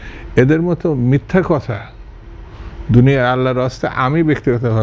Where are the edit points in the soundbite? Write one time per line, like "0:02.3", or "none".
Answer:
none